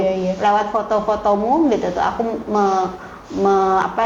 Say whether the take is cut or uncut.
uncut